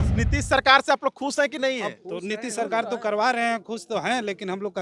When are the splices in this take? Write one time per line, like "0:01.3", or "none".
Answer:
none